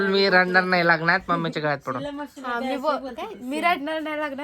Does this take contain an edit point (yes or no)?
no